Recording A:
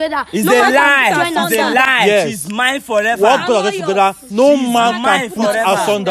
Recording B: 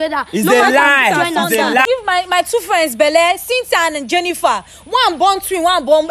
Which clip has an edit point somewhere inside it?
B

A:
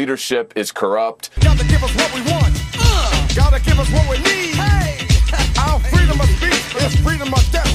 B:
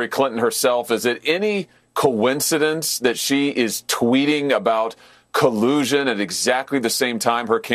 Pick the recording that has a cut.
A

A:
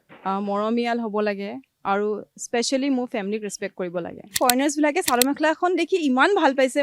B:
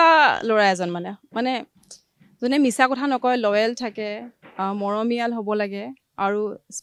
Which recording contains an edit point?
A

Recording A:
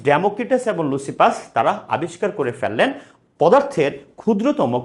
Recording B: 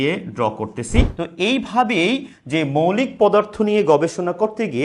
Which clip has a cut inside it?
B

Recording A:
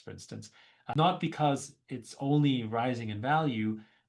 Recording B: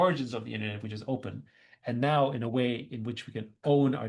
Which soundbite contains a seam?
A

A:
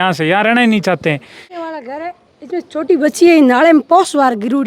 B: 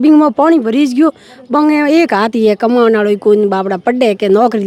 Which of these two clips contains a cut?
A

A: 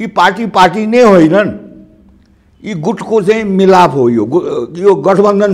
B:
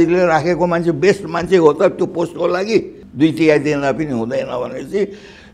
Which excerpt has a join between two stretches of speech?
B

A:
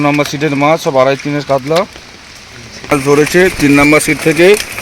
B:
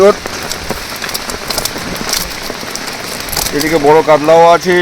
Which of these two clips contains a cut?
A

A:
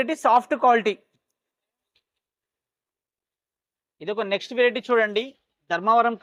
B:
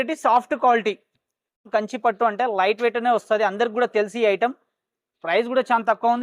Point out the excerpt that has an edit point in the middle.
B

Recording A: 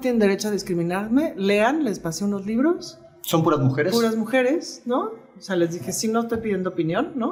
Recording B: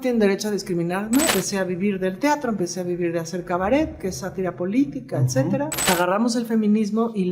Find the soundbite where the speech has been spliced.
B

